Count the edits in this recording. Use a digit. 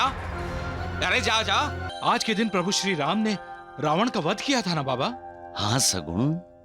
1